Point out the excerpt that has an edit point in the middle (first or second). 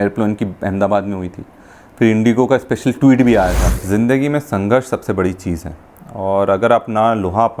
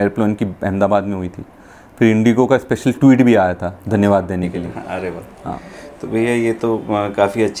first